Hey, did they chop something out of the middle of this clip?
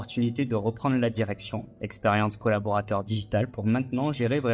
no; 0 cuts

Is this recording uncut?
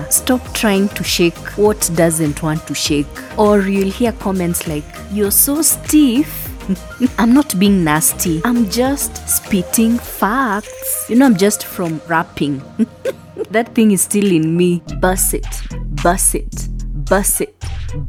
yes; 0 cuts

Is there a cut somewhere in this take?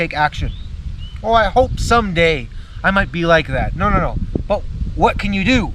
no; 0 cuts

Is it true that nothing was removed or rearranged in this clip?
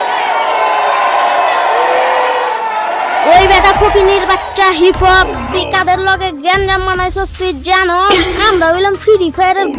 no; 1 cut; at 2.8 s

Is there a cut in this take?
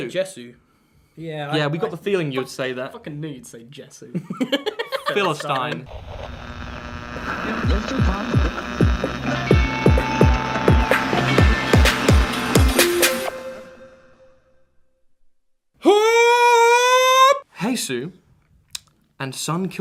no; 0 cuts

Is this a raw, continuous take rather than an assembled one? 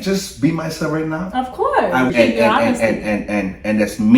no; 1 cut; at 2.1 s

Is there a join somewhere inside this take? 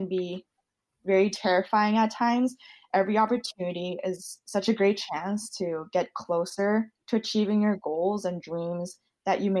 no; 0 cuts

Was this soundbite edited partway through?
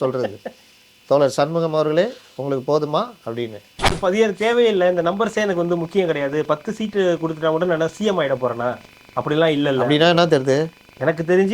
yes; 1 cut; at 3.8 s

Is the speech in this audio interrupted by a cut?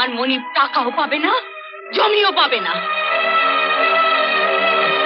no; 0 cuts

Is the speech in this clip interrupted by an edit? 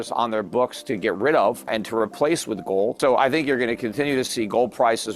yes; 2 cuts; at 1.7 s, 3.0 s

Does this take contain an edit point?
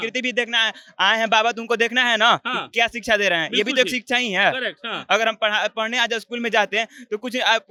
no; 0 cuts

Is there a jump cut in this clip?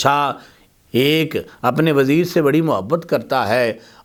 no; 0 cuts

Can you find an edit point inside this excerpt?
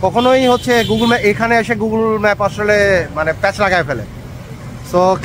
no; 0 cuts

